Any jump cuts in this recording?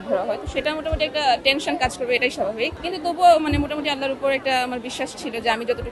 yes; 1 cut; at 2.8 s

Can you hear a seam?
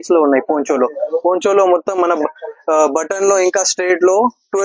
no; 0 cuts

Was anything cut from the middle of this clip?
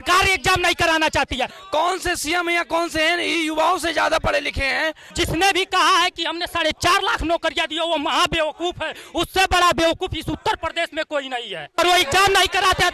yes; 3 cuts; at 1.6 s, 5.1 s, 11.8 s

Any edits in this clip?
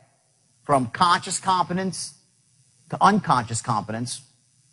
no; 0 cuts

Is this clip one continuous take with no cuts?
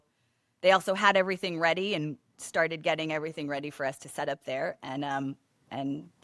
yes; 0 cuts

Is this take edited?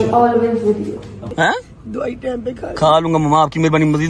yes; 1 cut; at 1.2 s

